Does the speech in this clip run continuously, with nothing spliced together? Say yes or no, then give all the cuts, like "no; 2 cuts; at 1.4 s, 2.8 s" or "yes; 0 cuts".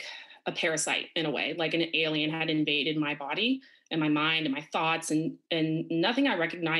yes; 0 cuts